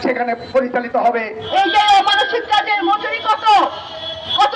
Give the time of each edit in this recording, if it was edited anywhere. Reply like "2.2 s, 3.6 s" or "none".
1.4 s